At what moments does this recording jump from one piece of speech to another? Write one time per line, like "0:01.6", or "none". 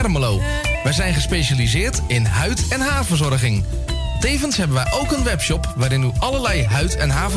none